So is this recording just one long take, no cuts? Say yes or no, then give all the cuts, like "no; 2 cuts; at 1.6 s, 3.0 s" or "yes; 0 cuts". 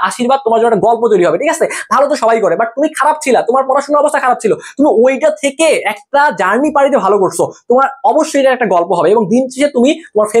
yes; 0 cuts